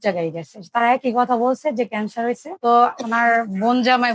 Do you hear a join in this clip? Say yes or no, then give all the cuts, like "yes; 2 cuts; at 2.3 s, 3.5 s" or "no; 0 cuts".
yes; 1 cut; at 2.5 s